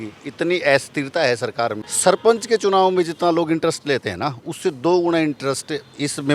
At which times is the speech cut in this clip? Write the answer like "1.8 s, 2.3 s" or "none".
1.9 s